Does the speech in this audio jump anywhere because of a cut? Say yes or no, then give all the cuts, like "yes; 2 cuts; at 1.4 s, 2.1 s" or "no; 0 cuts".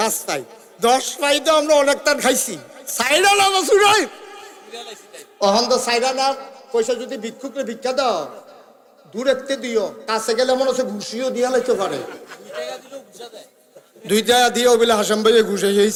no; 0 cuts